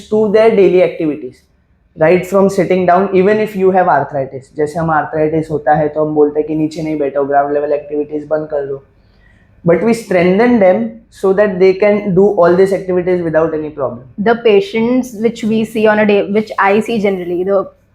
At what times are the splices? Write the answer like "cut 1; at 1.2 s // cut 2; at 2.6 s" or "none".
cut 1; at 14.0 s